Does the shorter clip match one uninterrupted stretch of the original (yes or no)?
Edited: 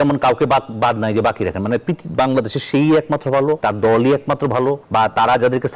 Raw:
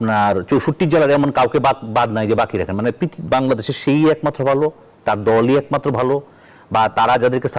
no